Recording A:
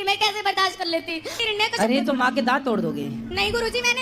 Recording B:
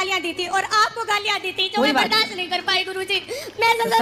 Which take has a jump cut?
A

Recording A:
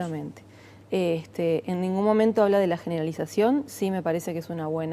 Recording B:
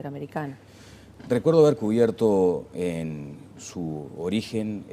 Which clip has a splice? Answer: A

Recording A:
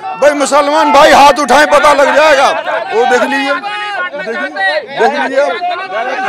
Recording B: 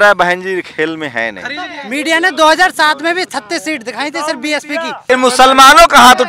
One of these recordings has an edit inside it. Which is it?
B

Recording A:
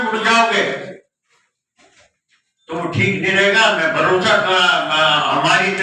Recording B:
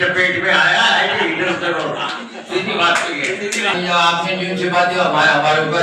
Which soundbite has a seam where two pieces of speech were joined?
B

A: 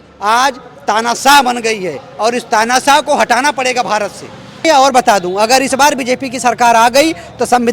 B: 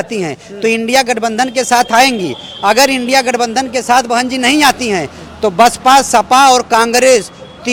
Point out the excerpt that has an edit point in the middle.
A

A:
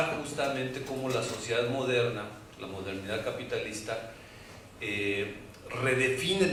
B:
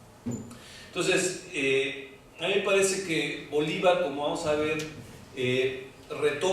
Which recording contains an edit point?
B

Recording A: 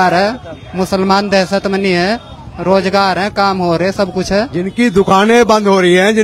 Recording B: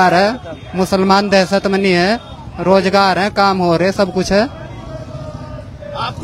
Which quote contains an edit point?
A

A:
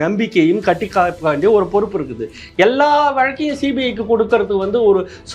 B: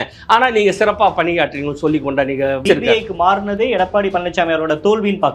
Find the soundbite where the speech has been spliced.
B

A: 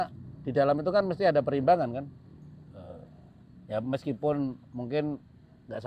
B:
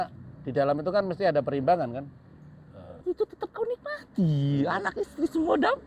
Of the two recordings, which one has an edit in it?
B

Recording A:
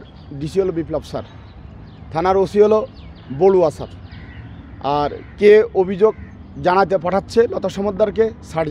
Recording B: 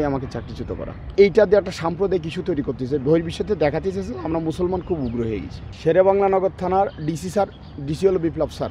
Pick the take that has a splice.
B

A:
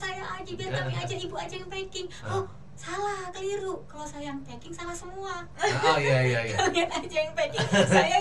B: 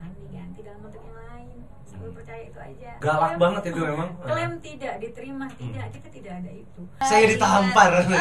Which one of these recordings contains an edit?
B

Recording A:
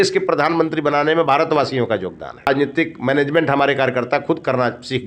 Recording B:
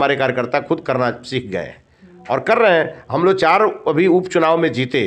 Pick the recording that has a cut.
A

